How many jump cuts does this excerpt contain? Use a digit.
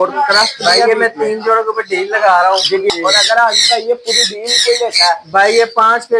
1